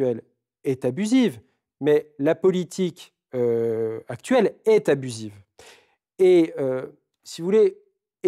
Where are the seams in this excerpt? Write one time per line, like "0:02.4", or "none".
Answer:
none